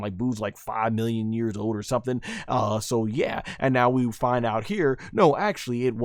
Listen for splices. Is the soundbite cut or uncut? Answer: uncut